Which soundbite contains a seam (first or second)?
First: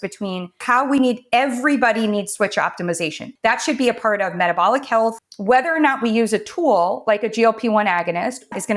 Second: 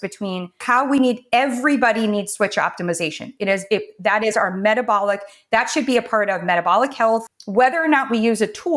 first